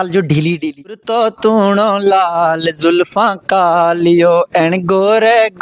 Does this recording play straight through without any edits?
no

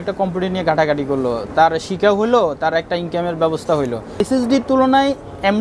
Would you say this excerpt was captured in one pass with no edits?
no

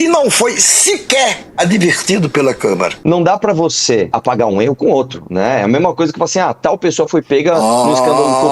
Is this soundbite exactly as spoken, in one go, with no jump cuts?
no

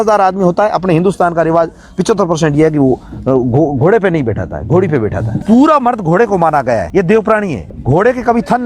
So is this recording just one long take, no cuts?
no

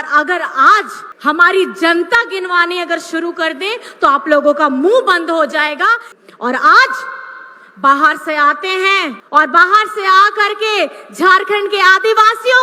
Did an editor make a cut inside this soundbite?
yes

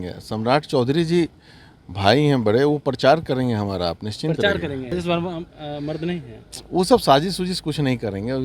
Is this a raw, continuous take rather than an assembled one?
no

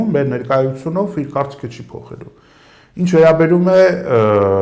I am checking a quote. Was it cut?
no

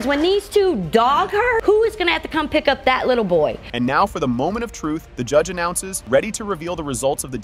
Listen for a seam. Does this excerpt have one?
no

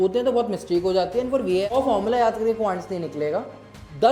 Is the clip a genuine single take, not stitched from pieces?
no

